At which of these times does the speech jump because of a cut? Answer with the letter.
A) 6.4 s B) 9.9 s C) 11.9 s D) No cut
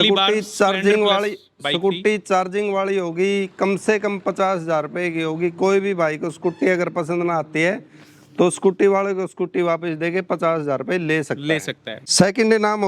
C